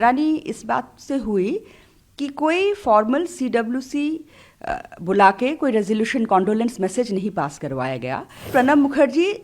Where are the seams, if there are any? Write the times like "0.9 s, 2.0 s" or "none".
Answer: 8.5 s